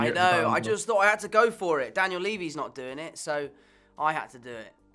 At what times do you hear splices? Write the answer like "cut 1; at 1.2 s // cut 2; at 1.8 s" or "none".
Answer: none